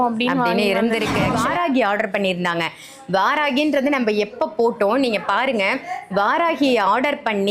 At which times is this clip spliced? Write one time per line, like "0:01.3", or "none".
0:01.3